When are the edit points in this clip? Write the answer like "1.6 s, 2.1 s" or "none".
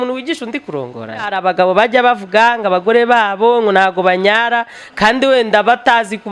1.3 s